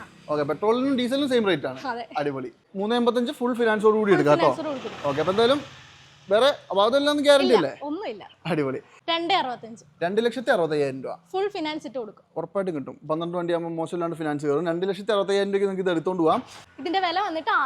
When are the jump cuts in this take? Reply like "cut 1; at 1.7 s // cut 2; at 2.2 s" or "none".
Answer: cut 1; at 2.5 s // cut 2; at 8.9 s // cut 3; at 16.6 s